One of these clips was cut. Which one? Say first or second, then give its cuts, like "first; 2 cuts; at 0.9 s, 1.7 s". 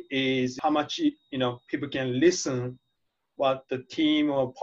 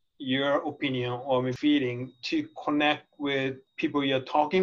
second; 2 cuts; at 1.5 s, 3.7 s